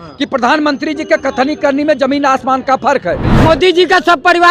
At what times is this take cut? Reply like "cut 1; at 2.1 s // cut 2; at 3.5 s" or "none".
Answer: cut 1; at 3.3 s